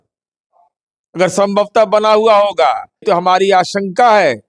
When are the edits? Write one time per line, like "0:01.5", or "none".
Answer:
0:02.9